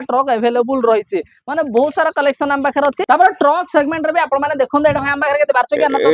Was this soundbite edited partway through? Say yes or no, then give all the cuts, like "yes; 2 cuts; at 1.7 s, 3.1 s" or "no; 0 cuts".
no; 0 cuts